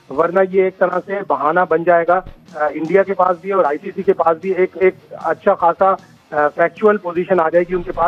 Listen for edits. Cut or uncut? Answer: uncut